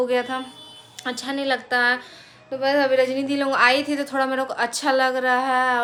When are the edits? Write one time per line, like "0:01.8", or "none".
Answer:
none